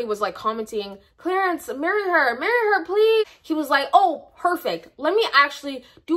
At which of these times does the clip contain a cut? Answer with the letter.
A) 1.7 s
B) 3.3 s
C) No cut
B